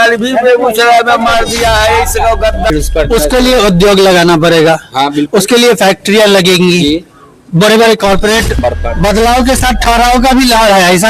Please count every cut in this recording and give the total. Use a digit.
2